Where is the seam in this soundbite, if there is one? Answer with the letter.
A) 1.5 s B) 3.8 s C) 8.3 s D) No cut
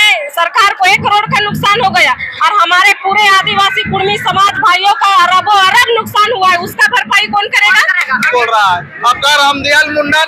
C